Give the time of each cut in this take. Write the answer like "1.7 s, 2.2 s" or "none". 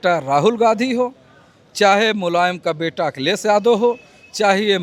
none